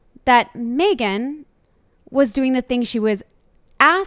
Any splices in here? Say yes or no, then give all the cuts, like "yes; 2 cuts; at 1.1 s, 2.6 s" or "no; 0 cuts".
no; 0 cuts